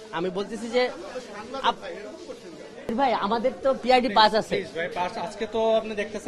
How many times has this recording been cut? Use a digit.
1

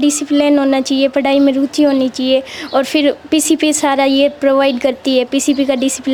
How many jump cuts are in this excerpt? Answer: 0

